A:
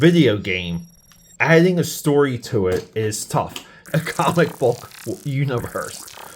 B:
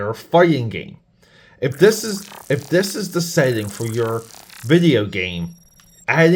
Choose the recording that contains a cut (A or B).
A